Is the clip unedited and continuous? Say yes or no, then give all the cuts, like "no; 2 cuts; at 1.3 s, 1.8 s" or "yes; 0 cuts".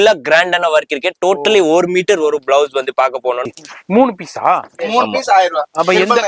no; 1 cut; at 3.4 s